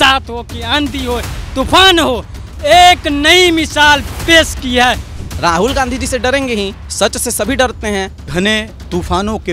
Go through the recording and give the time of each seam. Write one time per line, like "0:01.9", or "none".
0:05.1
0:06.8
0:08.3